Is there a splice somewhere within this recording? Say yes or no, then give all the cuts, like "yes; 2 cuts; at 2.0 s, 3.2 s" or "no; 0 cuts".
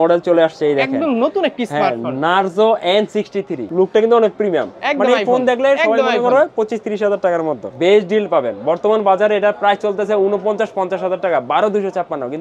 yes; 2 cuts; at 3.7 s, 7.7 s